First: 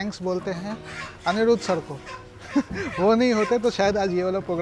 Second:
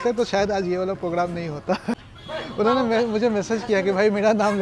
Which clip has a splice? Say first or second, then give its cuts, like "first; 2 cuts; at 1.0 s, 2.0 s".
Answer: second; 1 cut; at 2.1 s